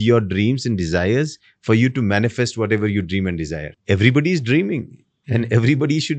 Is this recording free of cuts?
no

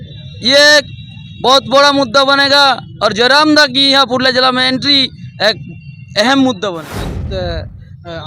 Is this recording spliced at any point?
yes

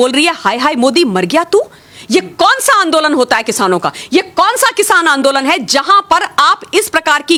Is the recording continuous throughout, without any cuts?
yes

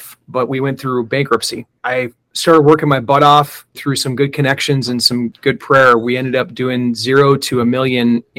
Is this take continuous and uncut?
no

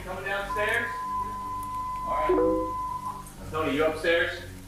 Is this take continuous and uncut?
yes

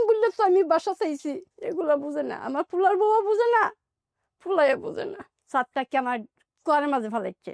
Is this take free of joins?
no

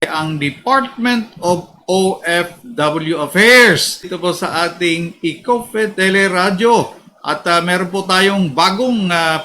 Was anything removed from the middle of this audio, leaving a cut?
yes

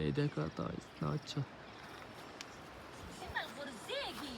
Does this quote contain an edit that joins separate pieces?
no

